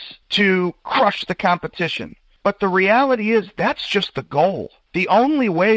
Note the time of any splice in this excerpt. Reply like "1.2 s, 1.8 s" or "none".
4.8 s